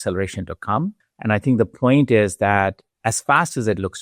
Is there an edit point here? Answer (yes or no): yes